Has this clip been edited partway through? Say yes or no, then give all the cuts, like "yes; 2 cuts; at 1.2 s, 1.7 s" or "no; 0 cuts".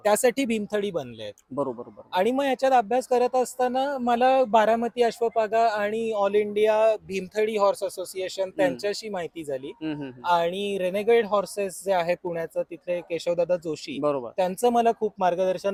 no; 0 cuts